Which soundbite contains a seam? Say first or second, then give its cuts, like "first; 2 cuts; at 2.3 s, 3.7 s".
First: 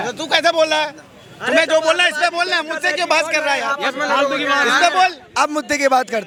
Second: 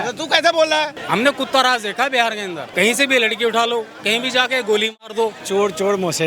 second; 3 cuts; at 1.0 s, 2.6 s, 5.4 s